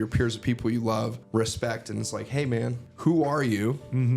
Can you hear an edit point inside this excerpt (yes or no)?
yes